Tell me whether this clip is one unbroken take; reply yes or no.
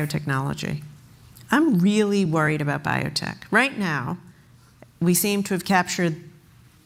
yes